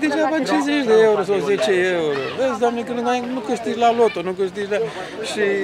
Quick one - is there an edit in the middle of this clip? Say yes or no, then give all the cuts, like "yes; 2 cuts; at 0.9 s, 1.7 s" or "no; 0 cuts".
no; 0 cuts